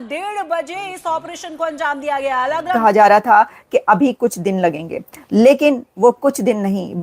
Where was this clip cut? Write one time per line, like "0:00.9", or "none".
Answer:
0:02.8